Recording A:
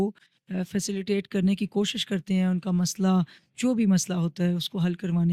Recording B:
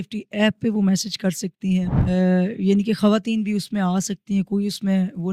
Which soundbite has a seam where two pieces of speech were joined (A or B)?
B